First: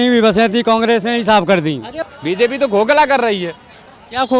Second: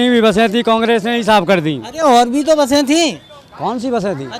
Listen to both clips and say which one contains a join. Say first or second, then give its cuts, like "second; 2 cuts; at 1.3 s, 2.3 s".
first; 1 cut; at 2.0 s